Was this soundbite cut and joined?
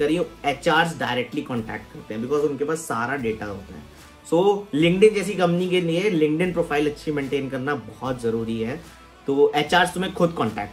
no; 0 cuts

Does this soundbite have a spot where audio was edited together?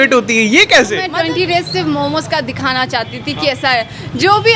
yes; 1 cut; at 1.1 s

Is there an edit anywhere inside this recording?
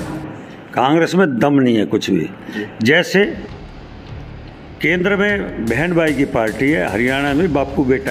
no; 0 cuts

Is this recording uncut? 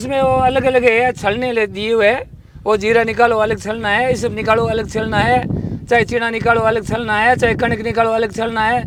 yes; 0 cuts

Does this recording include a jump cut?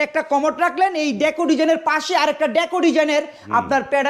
no; 0 cuts

